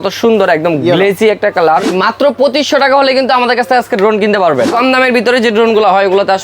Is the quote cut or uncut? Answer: cut